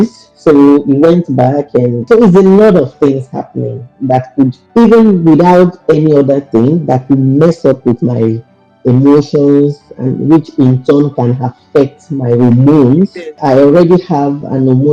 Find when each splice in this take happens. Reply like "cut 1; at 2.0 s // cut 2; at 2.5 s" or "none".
cut 1; at 2.0 s // cut 2; at 4.6 s // cut 3; at 13.4 s